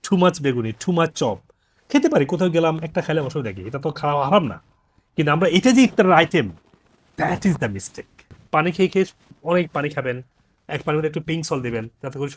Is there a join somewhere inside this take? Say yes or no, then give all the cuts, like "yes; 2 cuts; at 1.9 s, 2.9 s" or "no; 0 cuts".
yes; 1 cut; at 8.3 s